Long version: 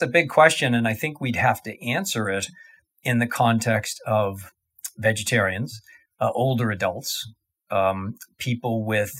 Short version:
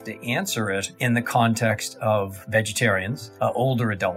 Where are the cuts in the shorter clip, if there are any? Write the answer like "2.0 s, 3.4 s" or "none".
0.9 s, 2.4 s, 3.2 s